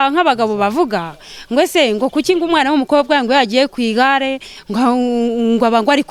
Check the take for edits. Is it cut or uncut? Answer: uncut